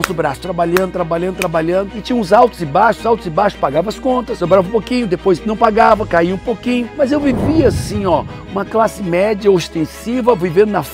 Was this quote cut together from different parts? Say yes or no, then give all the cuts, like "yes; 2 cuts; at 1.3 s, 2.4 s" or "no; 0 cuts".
yes; 1 cut; at 4.3 s